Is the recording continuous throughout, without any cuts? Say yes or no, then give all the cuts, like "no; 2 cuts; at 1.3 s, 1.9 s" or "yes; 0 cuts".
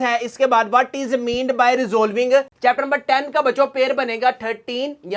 no; 1 cut; at 2.5 s